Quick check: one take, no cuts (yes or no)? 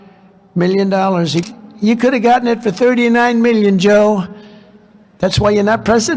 no